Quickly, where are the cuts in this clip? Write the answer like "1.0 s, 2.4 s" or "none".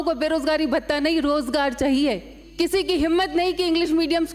2.5 s